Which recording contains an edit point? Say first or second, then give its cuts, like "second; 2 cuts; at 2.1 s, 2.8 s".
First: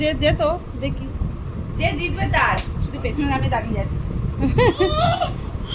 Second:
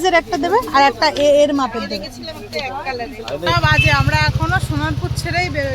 second; 1 cut; at 3.5 s